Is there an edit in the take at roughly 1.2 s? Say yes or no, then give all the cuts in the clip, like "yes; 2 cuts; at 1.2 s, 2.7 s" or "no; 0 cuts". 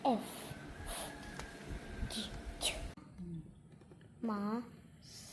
no; 1 cut; at 3.1 s